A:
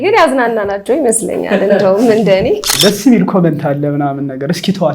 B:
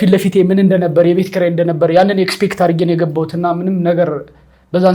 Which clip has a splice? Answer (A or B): A